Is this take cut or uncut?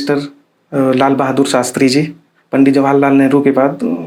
uncut